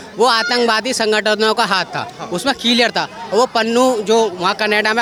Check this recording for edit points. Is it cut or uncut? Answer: uncut